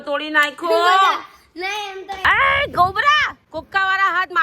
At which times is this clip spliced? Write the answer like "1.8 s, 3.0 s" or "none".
2.0 s, 3.4 s